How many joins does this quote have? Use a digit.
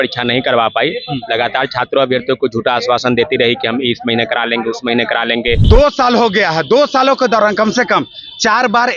1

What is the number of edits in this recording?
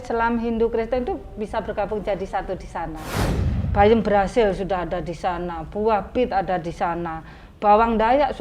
1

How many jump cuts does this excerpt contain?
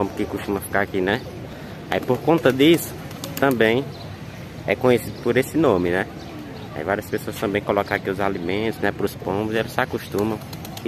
0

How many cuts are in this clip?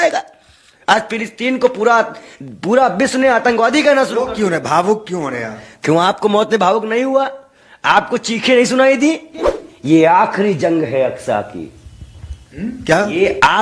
1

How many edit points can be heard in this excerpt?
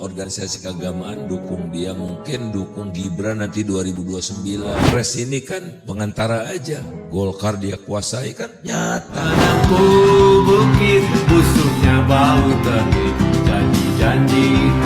2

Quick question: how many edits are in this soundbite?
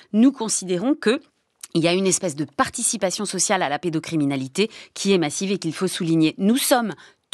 0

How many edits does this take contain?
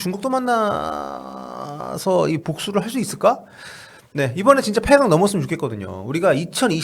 0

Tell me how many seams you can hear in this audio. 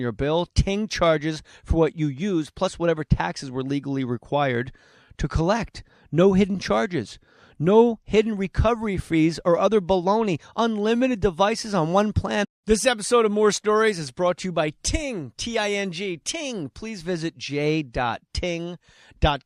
0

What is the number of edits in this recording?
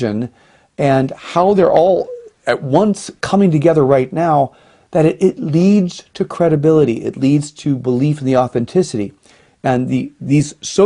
1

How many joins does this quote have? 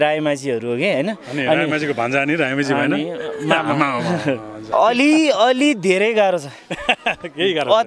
1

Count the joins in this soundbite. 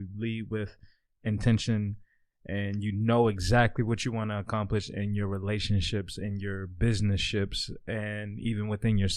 0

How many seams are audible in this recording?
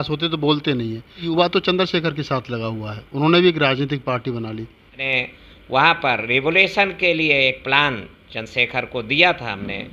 2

